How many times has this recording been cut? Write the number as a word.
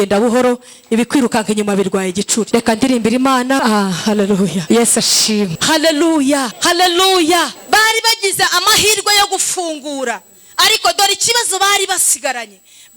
six